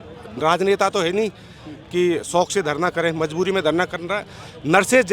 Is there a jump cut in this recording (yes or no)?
no